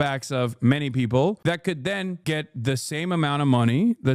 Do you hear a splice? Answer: no; 0 cuts

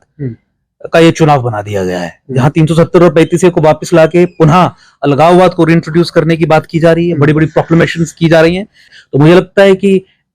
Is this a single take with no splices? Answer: no; 1 cut; at 8.9 s

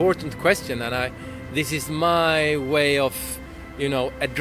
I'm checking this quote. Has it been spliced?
no; 0 cuts

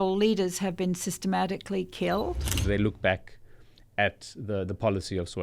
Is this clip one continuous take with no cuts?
no; 1 cut; at 2.6 s

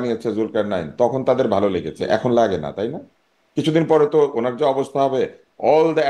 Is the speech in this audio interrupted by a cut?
no; 0 cuts

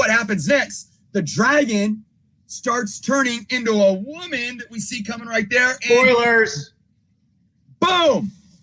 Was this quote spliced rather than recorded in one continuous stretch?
no; 0 cuts

